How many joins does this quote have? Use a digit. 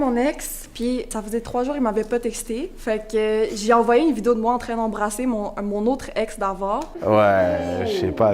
3